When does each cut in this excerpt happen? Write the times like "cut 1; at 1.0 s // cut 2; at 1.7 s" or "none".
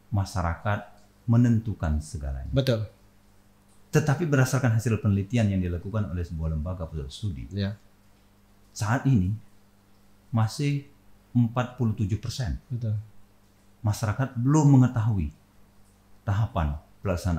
none